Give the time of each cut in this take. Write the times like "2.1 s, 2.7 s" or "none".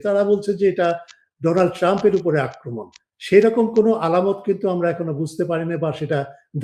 none